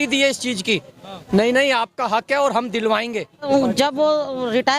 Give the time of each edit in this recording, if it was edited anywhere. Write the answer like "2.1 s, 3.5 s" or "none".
3.5 s